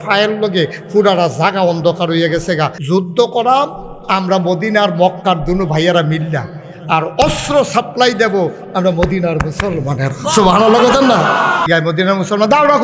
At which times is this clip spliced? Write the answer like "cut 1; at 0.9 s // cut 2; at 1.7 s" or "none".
cut 1; at 2.8 s // cut 2; at 11.7 s

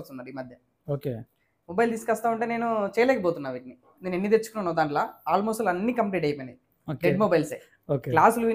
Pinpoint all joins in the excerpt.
cut 1; at 3.9 s

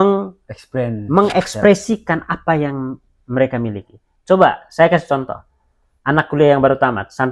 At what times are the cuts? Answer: none

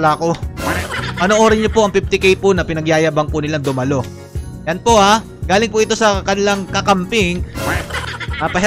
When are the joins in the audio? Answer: none

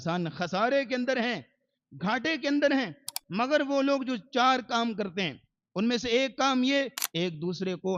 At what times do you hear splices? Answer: cut 1; at 7.0 s

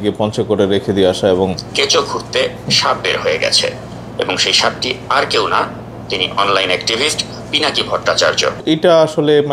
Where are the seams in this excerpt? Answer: cut 1; at 1.6 s // cut 2; at 8.6 s

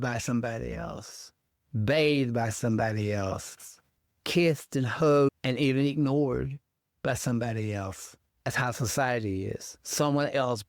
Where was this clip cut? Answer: none

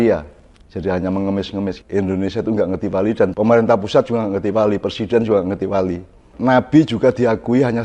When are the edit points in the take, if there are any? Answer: cut 1; at 1.8 s // cut 2; at 6.3 s

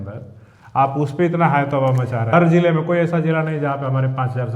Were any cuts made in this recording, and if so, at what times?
cut 1; at 2.3 s

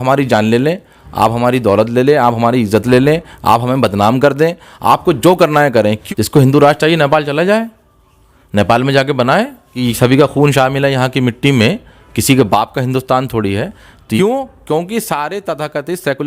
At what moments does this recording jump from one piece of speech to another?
cut 1; at 6.0 s // cut 2; at 9.8 s // cut 3; at 14.2 s

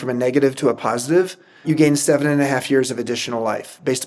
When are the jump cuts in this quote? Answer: cut 1; at 1.6 s

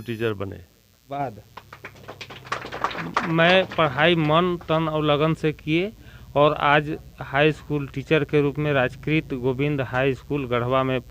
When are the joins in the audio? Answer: cut 1; at 1.2 s

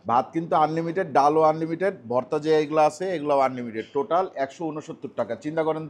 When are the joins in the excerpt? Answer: none

